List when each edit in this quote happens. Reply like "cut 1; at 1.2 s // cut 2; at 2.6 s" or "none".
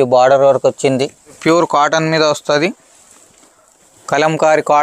cut 1; at 1.4 s